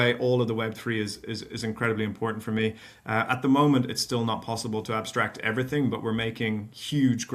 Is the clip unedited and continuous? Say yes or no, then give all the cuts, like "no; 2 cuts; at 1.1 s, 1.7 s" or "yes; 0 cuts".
yes; 0 cuts